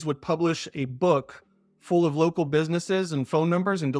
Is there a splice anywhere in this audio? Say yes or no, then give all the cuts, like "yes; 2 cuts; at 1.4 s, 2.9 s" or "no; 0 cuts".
no; 0 cuts